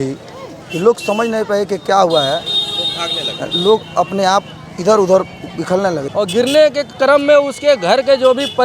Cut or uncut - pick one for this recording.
cut